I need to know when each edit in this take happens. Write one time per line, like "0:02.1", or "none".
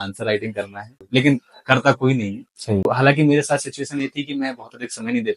0:01.0
0:02.9